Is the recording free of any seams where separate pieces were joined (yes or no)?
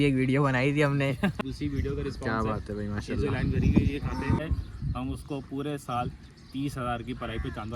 no